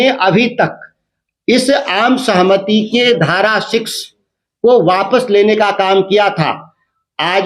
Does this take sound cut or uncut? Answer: uncut